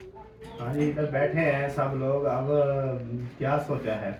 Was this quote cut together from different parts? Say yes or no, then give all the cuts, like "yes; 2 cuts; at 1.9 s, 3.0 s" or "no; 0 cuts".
no; 0 cuts